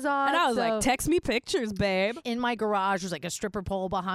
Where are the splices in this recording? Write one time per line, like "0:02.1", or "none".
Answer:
0:02.2